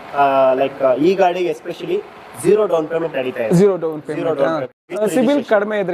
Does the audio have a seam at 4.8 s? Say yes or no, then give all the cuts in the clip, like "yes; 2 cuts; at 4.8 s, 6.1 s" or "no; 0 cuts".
yes; 1 cut; at 4.8 s